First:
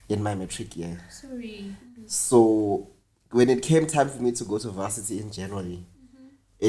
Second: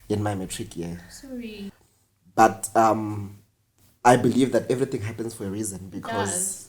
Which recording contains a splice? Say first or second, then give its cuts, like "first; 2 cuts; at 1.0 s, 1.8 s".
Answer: second; 1 cut; at 1.8 s